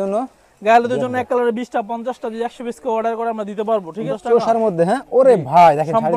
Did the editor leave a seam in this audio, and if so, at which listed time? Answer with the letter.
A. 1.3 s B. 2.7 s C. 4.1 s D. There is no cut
C